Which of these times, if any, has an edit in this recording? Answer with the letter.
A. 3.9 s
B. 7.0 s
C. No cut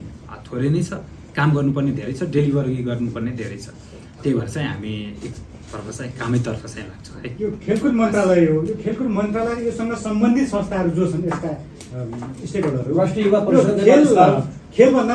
C